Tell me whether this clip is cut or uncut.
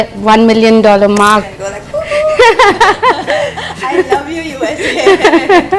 cut